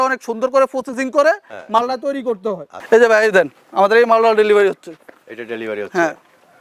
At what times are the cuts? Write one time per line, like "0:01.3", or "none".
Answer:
0:02.7